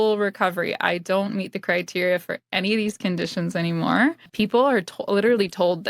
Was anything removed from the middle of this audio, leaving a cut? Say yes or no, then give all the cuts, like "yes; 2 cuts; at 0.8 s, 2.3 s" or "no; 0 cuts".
yes; 1 cut; at 4.2 s